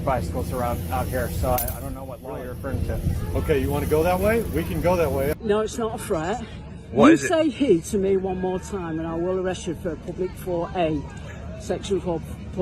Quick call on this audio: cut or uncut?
cut